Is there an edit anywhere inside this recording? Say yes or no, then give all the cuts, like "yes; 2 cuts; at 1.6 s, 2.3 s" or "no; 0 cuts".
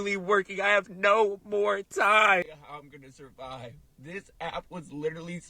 yes; 1 cut; at 2.5 s